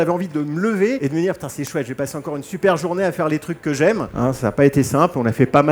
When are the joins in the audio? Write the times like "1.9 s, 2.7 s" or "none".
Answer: 1.0 s, 4.1 s